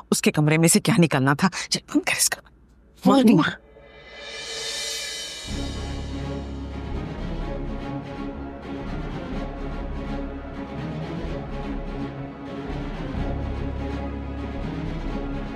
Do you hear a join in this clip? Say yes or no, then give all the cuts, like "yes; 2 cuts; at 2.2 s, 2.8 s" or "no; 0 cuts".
no; 0 cuts